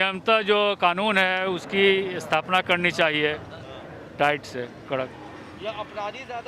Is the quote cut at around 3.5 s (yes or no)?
no